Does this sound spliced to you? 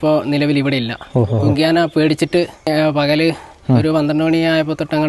yes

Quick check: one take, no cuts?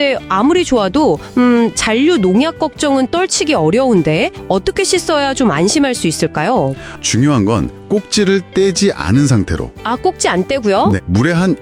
yes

